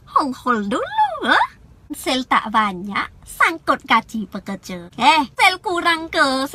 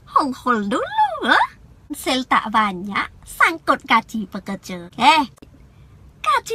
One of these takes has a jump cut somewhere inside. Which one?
second; 1 cut; at 5.3 s

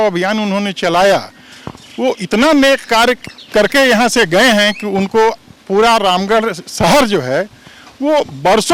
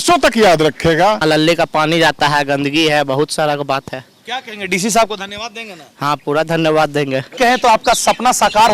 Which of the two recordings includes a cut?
second; 2 cuts; at 1.2 s, 7.3 s

